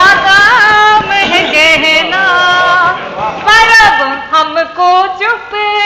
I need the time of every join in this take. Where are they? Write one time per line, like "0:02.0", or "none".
none

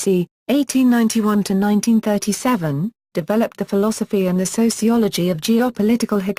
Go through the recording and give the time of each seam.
0:02.0

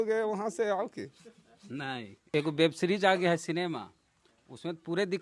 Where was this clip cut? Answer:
0:02.3

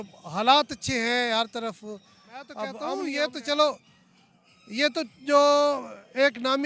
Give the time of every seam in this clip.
0:03.0

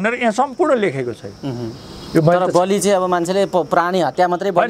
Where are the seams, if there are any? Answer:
none

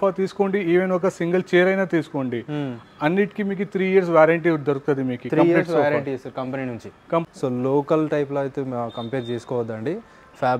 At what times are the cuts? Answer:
0:07.3

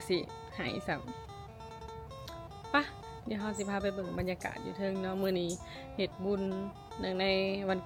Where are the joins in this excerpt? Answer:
none

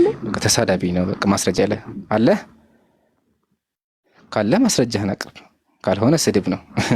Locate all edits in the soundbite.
none

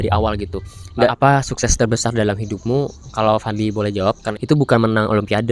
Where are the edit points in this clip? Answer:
0:01.1
0:04.3

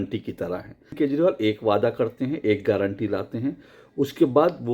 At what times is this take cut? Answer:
0:00.9

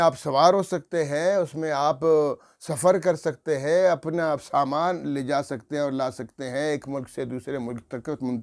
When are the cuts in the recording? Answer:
none

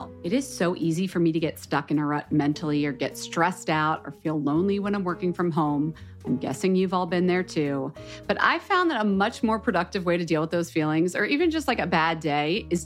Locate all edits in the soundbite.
none

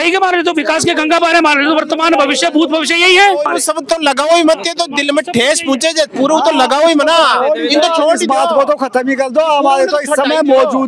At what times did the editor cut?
none

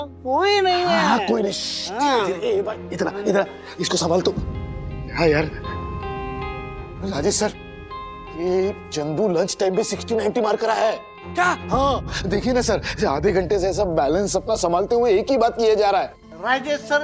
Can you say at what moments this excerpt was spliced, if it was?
none

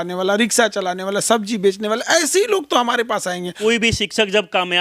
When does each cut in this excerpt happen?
0:03.5

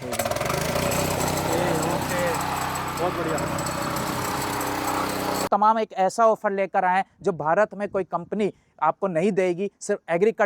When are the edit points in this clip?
0:05.4

